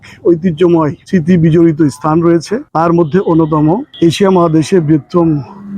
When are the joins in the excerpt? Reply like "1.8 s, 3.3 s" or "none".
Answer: 1.0 s, 2.6 s, 3.9 s